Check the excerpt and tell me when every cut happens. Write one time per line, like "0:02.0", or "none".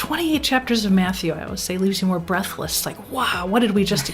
0:02.9